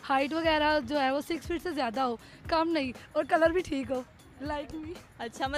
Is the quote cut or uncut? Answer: uncut